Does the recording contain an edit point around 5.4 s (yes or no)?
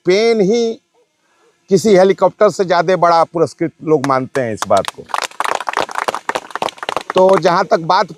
no